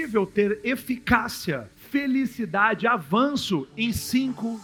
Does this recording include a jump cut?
no; 0 cuts

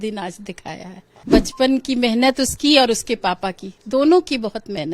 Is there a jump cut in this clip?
yes; 1 cut; at 1.1 s

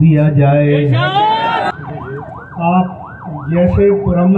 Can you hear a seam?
yes; 1 cut; at 1.7 s

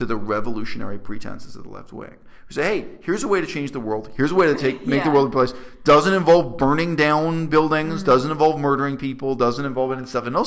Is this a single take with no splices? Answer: yes; 0 cuts

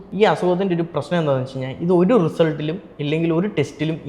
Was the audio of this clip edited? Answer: no; 0 cuts

